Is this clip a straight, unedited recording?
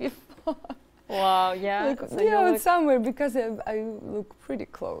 yes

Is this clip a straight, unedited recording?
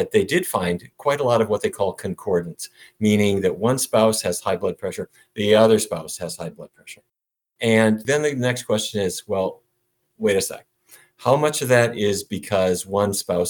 no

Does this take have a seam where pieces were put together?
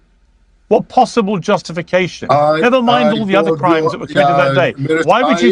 no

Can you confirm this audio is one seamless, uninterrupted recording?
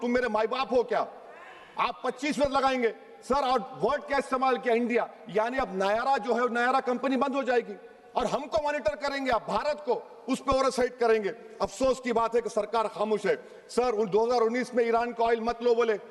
yes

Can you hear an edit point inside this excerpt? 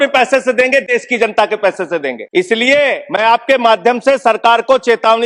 yes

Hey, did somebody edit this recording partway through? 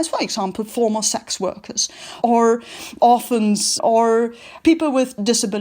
yes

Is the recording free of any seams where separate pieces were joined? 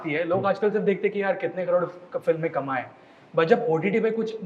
yes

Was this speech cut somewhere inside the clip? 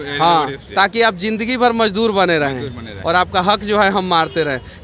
no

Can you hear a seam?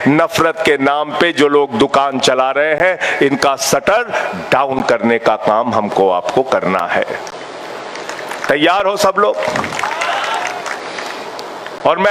no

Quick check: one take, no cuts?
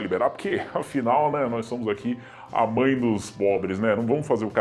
yes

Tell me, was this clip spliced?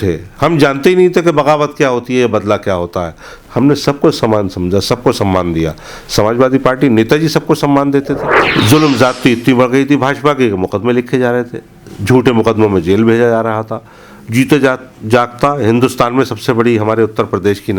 yes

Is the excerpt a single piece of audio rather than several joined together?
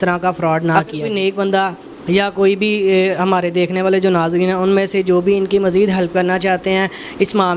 no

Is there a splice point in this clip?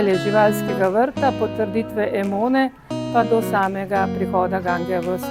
no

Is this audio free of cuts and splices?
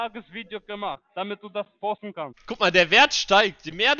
yes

